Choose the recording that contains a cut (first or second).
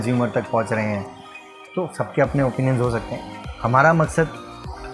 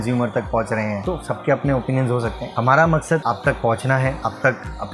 second